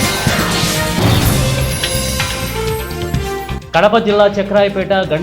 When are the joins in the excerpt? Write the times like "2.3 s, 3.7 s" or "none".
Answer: 3.5 s